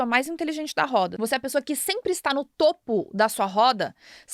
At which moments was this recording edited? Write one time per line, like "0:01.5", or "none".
0:01.1

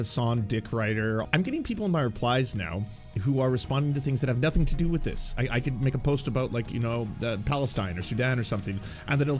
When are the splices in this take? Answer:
0:01.3

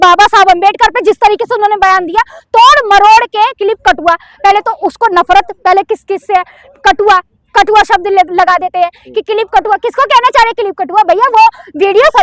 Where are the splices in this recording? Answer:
none

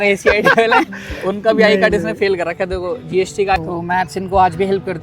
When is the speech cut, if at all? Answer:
0:03.6

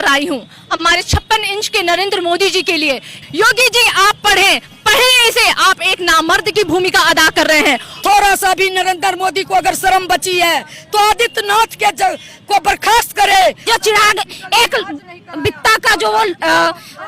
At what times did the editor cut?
0:03.2
0:07.9
0:13.6

